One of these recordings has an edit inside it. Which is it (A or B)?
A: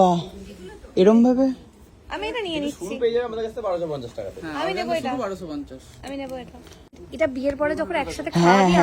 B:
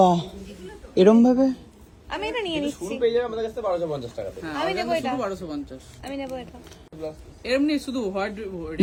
A